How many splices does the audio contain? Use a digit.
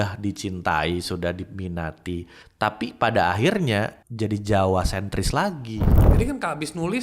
3